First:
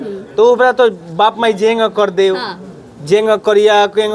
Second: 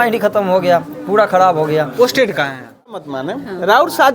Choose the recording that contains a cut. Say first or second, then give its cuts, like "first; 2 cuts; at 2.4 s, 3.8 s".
second; 1 cut; at 3.0 s